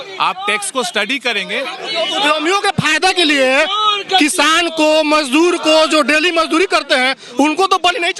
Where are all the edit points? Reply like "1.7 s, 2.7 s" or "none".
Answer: none